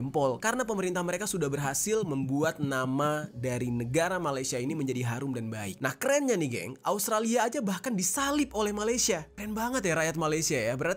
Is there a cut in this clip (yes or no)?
yes